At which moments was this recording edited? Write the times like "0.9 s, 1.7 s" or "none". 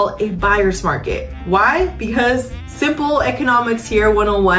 none